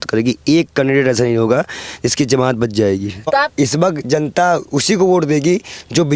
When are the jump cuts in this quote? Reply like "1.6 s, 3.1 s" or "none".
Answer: 3.5 s